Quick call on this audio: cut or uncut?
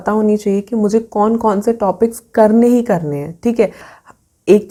uncut